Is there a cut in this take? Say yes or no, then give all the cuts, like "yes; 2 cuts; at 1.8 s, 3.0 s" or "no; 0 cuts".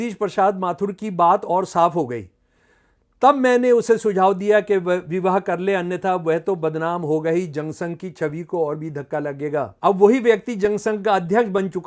yes; 1 cut; at 9.7 s